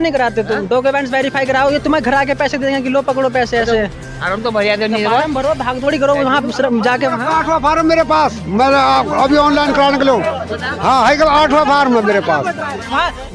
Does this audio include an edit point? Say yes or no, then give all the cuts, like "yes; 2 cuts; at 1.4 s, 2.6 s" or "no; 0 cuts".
no; 0 cuts